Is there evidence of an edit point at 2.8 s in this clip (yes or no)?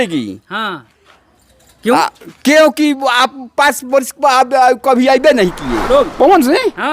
no